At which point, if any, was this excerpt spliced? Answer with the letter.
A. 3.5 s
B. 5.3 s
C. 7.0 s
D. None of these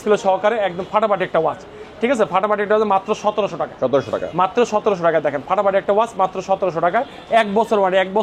D